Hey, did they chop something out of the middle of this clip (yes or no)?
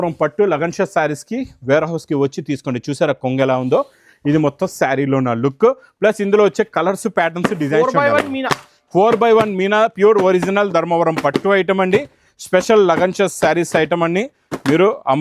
no